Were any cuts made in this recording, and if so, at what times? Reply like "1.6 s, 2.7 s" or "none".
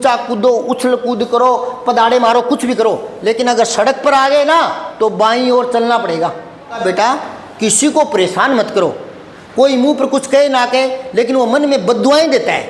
6.8 s